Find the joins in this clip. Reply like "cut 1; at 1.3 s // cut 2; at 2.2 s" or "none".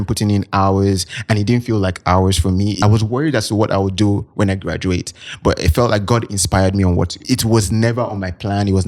cut 1; at 2.8 s // cut 2; at 7.2 s